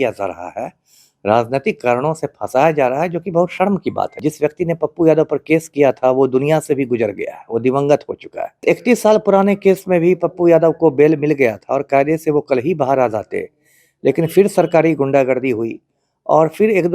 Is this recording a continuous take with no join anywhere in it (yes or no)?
no